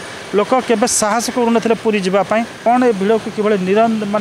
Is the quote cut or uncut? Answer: cut